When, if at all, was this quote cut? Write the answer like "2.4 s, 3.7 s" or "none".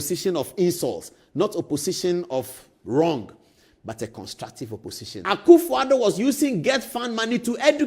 5.1 s